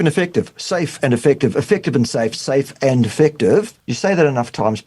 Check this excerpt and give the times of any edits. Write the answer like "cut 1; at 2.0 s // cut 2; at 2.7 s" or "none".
cut 1; at 3.8 s